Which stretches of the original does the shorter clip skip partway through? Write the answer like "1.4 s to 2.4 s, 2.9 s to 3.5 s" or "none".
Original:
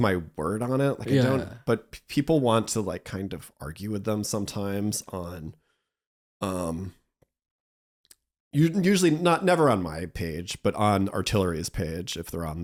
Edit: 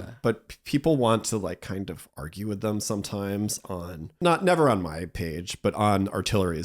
5.6 s to 9.2 s